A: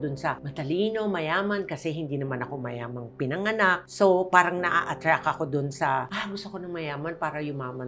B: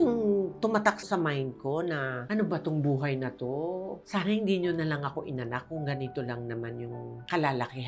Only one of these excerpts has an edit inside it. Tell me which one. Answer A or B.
B